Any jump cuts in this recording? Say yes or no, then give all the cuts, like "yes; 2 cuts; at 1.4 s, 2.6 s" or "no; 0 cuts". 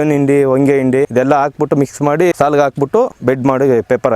yes; 3 cuts; at 1.1 s, 2.3 s, 3.1 s